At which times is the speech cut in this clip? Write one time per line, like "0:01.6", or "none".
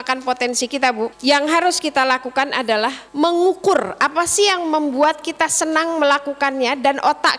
0:01.2
0:03.0